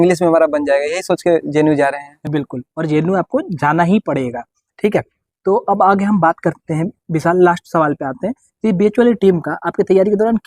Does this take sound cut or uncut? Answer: uncut